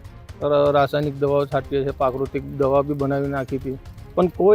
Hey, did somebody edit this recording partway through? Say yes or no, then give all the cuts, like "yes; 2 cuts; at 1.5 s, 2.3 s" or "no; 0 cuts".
no; 0 cuts